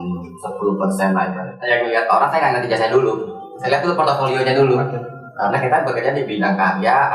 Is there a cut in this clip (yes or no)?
yes